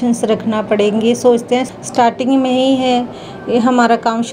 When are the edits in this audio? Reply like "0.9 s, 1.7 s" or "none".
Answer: 1.7 s